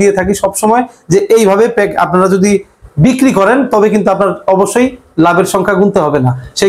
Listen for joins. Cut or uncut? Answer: uncut